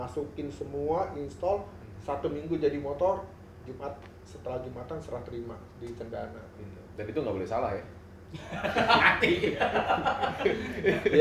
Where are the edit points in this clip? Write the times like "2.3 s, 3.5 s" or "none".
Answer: none

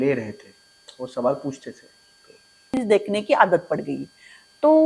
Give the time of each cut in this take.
2.8 s

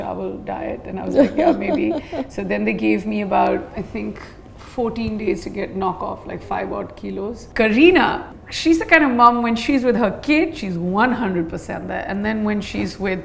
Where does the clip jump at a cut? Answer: 7.4 s, 8.3 s

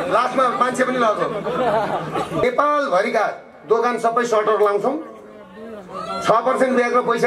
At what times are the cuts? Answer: 2.4 s

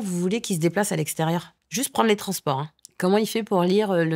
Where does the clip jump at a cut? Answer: 1.6 s, 2.8 s

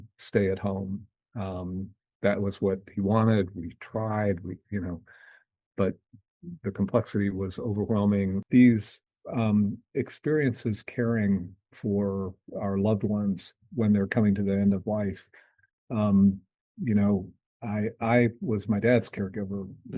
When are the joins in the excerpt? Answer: 8.4 s

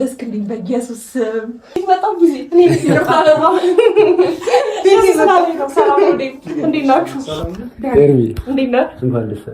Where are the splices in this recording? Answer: 1.8 s

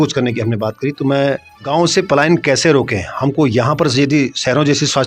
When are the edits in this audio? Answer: 1.7 s

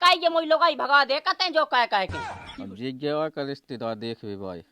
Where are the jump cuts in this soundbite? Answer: 2.2 s

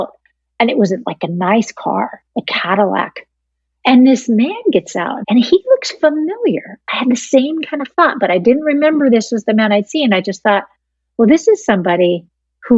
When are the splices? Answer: 5.1 s

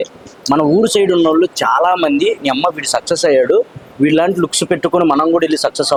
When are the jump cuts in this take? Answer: none

